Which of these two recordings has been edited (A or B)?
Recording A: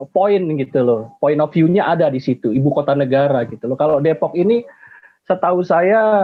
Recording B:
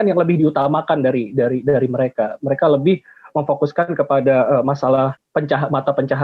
B